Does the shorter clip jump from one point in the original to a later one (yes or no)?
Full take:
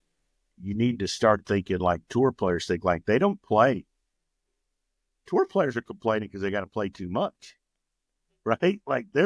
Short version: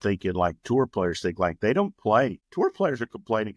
yes